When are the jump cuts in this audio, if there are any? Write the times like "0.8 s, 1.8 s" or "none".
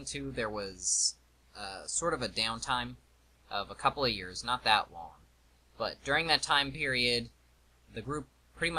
3.1 s